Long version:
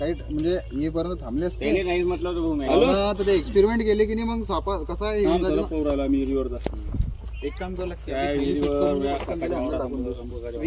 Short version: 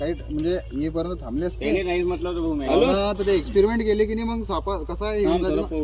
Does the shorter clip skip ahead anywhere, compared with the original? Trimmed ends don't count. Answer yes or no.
no